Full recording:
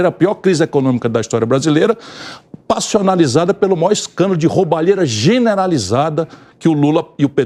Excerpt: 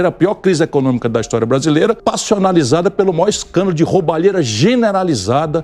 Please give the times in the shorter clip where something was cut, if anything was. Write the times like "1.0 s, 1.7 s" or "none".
2.0 s